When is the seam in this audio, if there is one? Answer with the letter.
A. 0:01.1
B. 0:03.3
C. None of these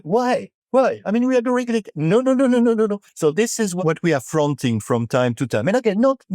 B